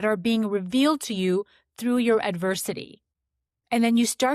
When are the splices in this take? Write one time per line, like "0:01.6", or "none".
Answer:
none